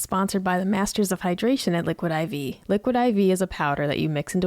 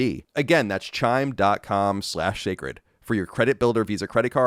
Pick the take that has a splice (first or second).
first